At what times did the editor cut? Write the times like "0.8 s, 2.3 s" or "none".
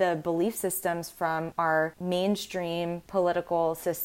none